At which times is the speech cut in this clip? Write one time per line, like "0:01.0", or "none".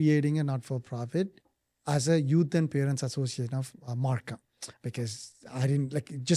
none

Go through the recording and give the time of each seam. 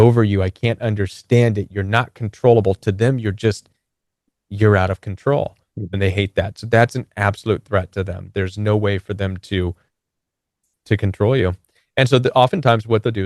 none

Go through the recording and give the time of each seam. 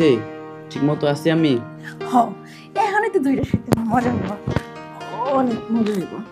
none

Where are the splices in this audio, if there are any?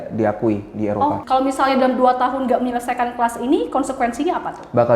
0:01.2

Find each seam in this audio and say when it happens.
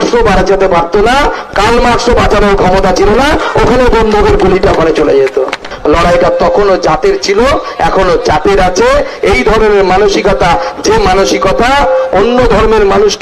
0:05.7

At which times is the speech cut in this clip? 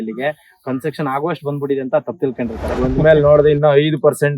0:02.7

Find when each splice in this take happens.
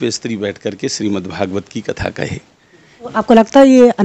0:03.1

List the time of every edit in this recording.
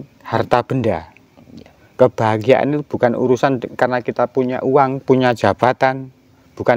none

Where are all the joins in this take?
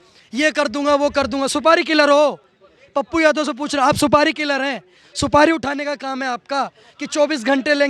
none

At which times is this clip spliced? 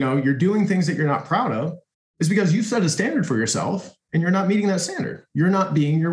0:05.2

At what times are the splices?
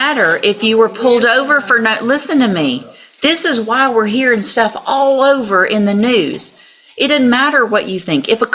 none

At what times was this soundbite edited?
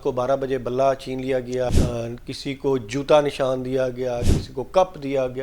0:01.7

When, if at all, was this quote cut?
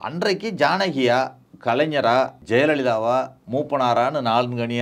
0:01.4
0:02.4

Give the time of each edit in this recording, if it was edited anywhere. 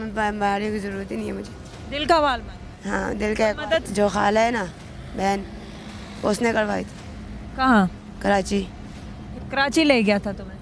0:03.9

